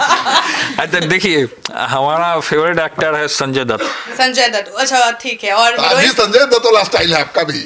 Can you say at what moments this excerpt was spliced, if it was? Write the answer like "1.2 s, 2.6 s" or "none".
none